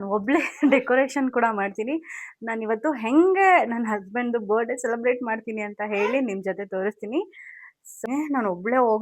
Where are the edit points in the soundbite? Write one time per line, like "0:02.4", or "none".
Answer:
0:08.0